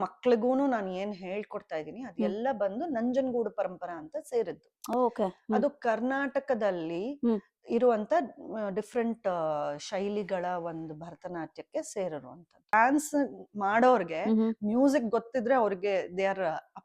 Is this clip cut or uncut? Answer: cut